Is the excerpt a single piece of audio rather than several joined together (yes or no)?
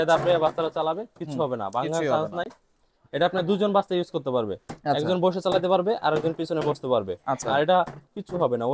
yes